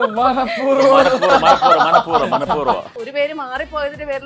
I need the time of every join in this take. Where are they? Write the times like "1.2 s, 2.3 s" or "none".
2.9 s